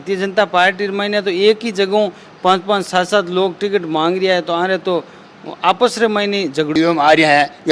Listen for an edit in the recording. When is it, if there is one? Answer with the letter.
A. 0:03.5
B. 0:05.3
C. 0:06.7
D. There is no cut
C